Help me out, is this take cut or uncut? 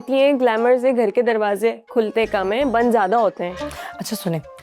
cut